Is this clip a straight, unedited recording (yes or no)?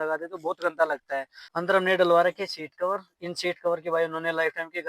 no